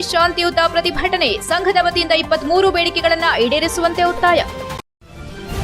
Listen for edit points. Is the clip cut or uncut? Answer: cut